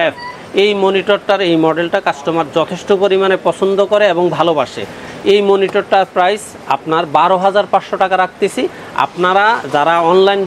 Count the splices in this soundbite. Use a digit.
0